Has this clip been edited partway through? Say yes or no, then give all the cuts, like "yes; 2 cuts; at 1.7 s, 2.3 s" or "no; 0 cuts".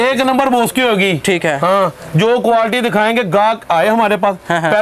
no; 0 cuts